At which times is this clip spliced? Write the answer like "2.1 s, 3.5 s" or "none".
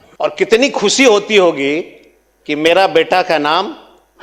none